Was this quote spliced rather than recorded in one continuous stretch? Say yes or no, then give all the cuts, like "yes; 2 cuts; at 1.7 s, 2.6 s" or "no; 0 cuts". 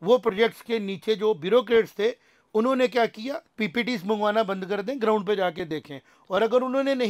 yes; 1 cut; at 3.5 s